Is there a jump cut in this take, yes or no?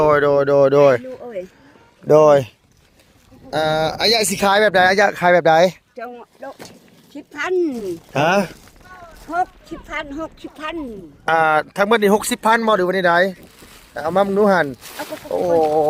no